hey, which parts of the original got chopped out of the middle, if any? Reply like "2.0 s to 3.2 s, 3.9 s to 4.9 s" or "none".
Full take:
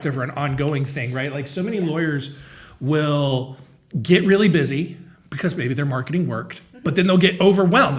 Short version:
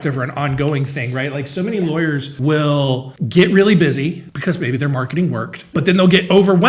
2.3 s to 2.7 s, 3.6 s to 3.9 s, 5.0 s to 5.2 s, 6.5 s to 6.6 s